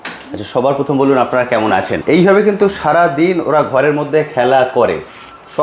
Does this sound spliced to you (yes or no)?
yes